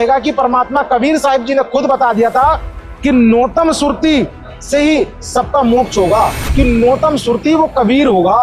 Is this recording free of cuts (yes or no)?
no